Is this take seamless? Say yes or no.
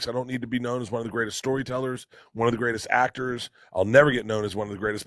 yes